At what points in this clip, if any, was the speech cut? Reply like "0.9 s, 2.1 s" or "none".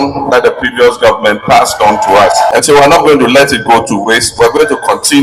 2.5 s